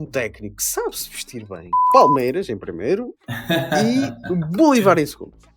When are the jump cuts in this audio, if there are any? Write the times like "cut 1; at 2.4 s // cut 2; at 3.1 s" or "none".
cut 1; at 1.8 s